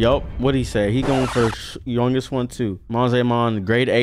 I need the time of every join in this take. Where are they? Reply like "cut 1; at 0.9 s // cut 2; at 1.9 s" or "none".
cut 1; at 2.8 s